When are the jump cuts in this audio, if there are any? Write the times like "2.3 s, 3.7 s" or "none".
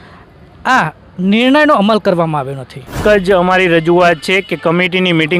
3.0 s